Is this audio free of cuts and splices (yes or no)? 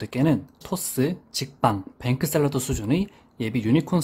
yes